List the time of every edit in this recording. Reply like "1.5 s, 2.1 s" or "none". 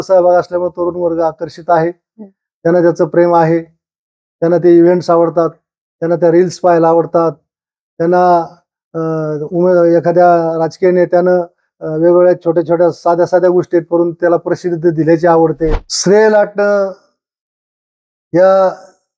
15.9 s